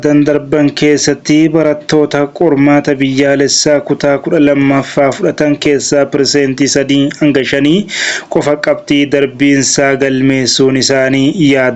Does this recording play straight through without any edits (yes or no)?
yes